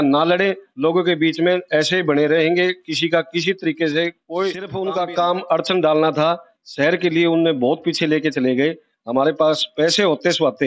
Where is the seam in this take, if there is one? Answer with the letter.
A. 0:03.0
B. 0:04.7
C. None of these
B